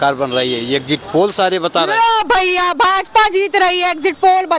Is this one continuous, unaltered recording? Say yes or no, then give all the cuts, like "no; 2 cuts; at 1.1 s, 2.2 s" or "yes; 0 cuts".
yes; 0 cuts